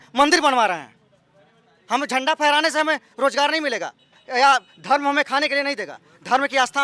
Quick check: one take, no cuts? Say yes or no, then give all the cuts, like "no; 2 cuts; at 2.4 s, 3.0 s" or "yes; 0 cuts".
yes; 0 cuts